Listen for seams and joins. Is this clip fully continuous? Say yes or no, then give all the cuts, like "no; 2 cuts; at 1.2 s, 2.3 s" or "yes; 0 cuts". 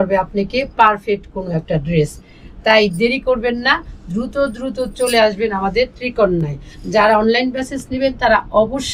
yes; 0 cuts